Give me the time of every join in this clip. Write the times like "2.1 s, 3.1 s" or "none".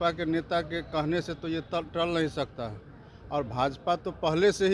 none